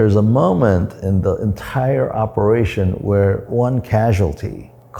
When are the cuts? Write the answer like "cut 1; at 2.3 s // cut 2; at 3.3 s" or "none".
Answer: cut 1; at 0.9 s // cut 2; at 3.5 s

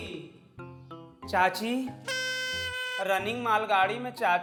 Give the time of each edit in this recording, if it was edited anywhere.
none

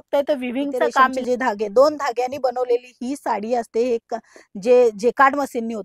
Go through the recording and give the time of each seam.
cut 1; at 1.2 s

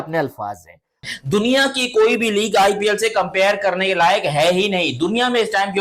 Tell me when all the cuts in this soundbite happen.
cut 1; at 1.1 s

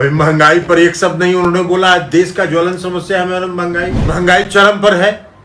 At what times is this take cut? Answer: cut 1; at 4.0 s

